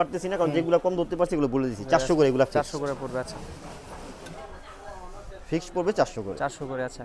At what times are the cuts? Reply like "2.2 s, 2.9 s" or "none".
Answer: none